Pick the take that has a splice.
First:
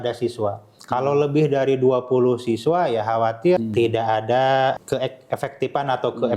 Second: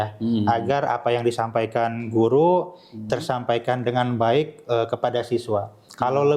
first; 2 cuts; at 3.6 s, 4.8 s

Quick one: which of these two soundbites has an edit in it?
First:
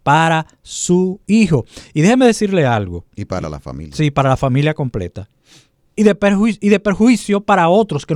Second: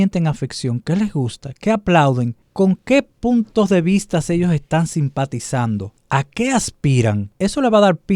second; 3 cuts; at 2.4 s, 5.9 s, 7.3 s

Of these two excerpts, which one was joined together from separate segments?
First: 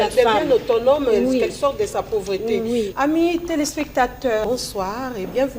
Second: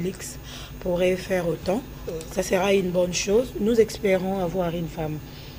first; 2 cuts; at 2.9 s, 4.4 s

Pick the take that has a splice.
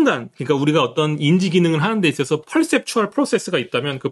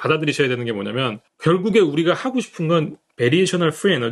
second; 1 cut; at 1.3 s

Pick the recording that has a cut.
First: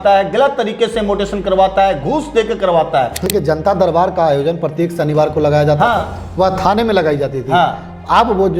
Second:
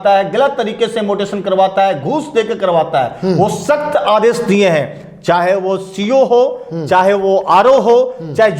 first; 1 cut; at 3.3 s

